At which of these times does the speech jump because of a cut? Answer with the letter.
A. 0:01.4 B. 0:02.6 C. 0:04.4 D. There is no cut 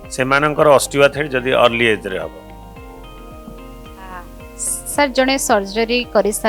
D